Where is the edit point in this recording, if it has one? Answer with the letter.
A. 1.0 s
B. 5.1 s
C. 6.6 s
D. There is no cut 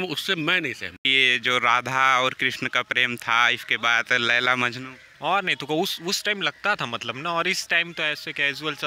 A